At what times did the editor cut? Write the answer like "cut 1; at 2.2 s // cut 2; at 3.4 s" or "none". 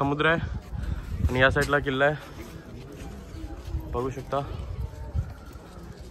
none